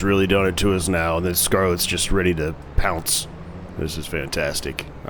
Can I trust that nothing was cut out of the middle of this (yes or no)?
yes